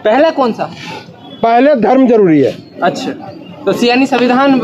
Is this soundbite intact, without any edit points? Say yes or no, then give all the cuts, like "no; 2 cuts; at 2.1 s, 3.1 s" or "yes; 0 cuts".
yes; 0 cuts